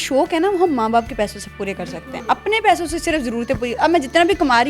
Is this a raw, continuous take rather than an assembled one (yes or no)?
yes